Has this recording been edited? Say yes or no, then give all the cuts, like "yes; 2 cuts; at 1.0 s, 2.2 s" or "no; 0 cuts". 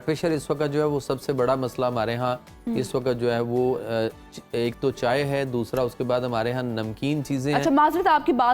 no; 0 cuts